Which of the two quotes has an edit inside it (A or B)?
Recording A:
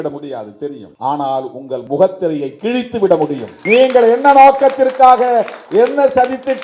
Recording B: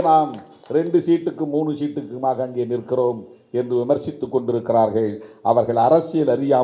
A